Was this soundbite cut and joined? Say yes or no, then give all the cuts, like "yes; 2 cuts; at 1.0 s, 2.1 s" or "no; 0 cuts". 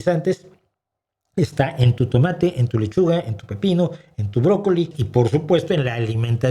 yes; 1 cut; at 5.0 s